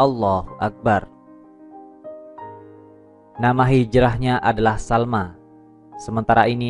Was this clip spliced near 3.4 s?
yes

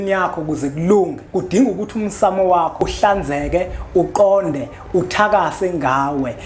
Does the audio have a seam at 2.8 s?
yes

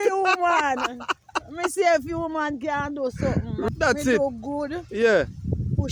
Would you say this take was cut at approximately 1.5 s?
no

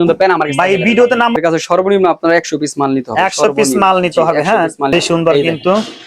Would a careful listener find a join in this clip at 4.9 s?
yes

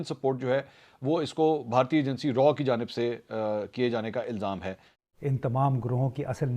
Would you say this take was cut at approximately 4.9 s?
yes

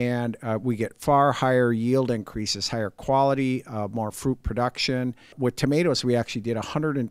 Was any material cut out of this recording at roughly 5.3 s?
yes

